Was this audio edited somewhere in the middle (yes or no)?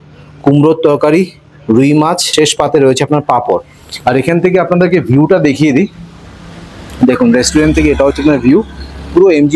yes